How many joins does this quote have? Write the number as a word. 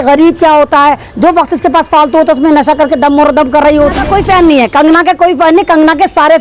one